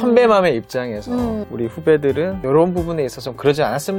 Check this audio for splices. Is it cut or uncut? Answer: uncut